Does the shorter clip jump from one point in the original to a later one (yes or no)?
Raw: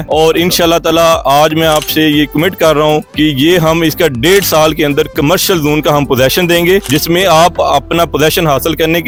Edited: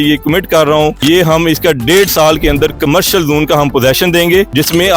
yes